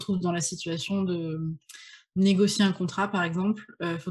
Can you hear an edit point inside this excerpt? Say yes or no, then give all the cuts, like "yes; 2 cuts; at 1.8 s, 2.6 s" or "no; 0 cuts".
no; 0 cuts